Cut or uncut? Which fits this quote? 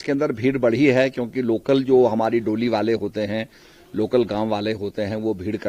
uncut